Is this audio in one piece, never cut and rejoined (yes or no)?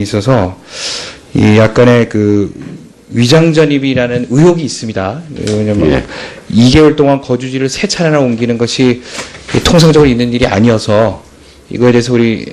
no